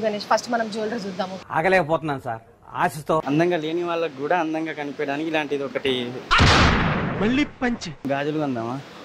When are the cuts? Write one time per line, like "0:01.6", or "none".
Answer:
0:03.2
0:08.1